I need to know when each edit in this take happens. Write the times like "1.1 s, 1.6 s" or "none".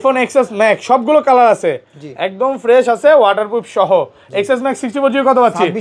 none